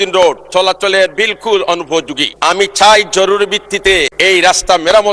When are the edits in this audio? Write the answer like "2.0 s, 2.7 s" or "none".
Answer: 2.2 s, 4.1 s